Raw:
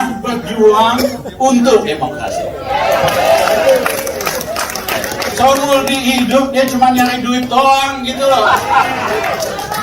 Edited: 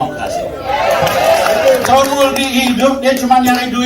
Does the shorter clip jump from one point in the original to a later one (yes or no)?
yes